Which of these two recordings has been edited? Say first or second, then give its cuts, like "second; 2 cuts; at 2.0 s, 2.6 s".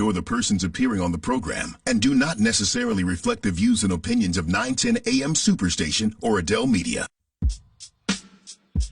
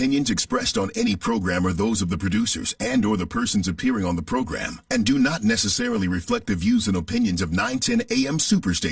first; 1 cut; at 7.1 s